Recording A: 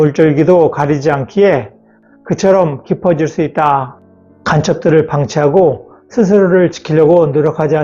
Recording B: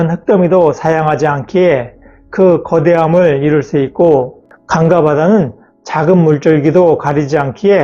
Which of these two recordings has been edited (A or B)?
A